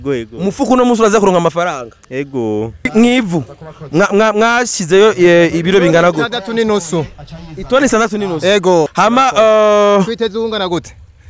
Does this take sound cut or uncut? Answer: cut